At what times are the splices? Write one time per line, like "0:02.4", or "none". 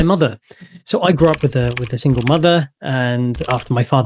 none